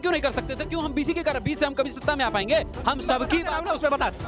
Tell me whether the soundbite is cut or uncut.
uncut